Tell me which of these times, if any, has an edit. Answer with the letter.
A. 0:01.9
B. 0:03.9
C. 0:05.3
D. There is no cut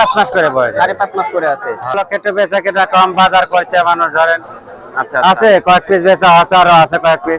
A